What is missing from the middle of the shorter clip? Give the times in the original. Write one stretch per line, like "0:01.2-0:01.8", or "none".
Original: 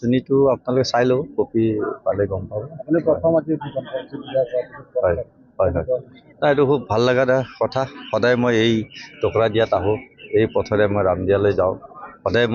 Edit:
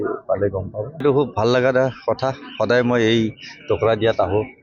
0:02.8-0:06.6